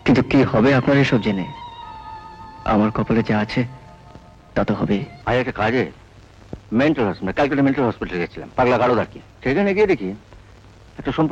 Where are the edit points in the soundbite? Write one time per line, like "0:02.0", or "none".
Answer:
0:05.1
0:09.2